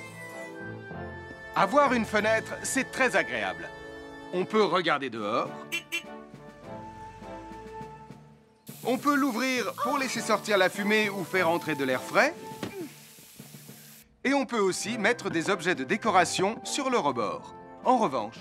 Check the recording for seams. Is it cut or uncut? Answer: uncut